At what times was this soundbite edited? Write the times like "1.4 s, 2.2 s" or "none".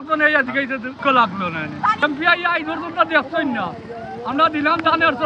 1.0 s, 2.0 s